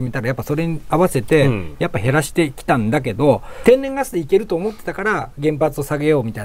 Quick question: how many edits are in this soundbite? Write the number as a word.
two